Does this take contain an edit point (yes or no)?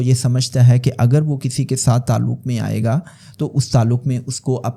no